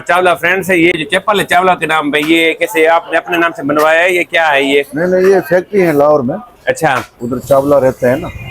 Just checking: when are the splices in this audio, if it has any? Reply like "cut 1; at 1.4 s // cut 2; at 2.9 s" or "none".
cut 1; at 0.9 s